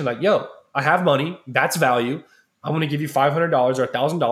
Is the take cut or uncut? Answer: uncut